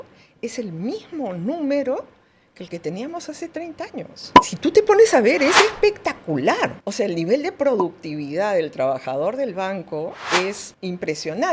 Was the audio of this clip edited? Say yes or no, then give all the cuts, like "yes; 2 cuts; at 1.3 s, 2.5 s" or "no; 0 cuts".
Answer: yes; 2 cuts; at 6.8 s, 10.7 s